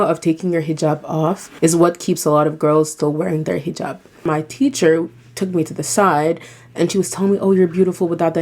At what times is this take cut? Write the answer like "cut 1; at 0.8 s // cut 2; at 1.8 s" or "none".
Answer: cut 1; at 1.5 s // cut 2; at 4.2 s